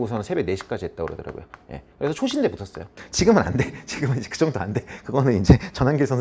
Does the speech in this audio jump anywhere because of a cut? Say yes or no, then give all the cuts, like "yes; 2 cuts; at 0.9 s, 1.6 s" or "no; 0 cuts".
yes; 1 cut; at 3.0 s